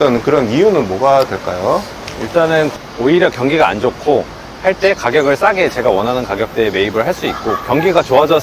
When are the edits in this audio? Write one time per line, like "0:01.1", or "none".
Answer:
0:02.8